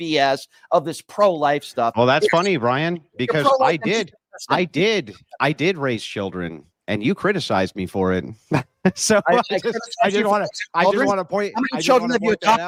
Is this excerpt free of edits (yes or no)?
yes